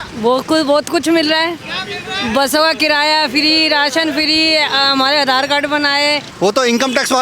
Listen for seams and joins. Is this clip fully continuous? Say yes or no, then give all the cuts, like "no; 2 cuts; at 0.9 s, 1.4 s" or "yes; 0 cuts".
no; 1 cut; at 6.3 s